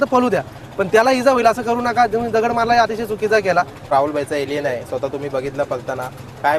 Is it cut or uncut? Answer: cut